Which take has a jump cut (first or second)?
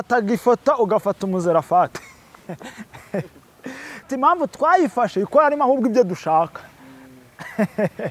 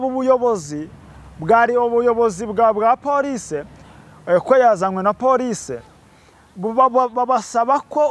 first